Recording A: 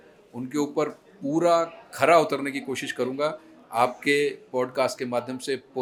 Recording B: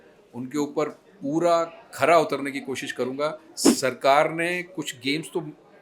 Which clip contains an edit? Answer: B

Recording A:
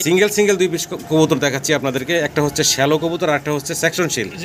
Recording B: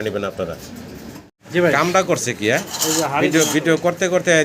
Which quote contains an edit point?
B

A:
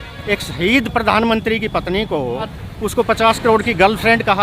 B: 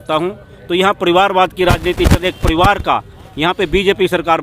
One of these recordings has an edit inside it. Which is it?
A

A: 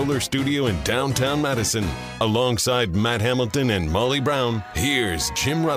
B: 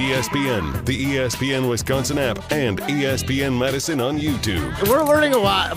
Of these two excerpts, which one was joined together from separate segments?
B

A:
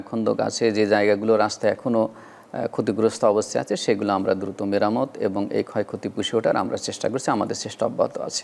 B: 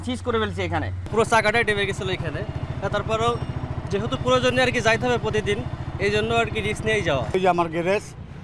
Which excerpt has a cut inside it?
B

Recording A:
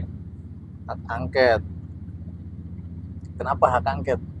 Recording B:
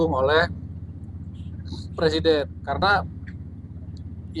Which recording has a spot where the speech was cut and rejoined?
B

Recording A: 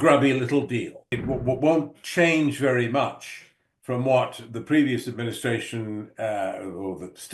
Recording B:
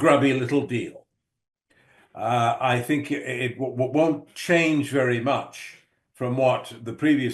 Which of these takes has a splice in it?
A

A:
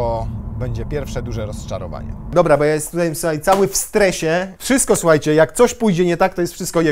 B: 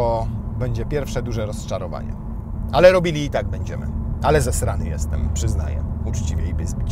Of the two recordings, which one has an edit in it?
A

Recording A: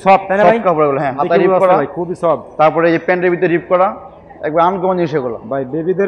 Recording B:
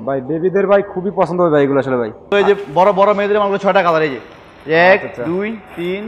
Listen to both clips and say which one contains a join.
B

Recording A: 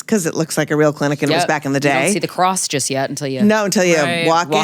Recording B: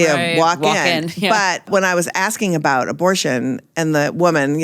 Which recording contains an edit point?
B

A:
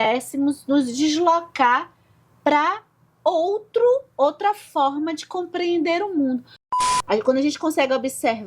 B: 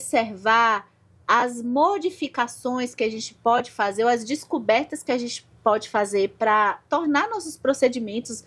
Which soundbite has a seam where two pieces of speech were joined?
A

